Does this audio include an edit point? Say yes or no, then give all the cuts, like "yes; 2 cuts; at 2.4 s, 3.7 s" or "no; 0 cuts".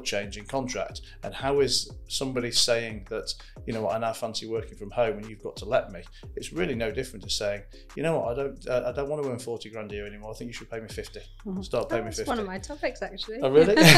no; 0 cuts